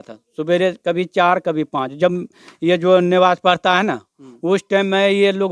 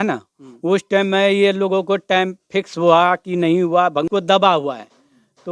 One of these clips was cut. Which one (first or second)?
second